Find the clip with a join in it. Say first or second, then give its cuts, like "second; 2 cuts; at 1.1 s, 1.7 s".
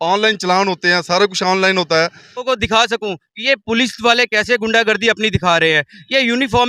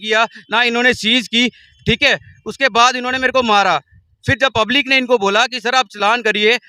first; 1 cut; at 2.4 s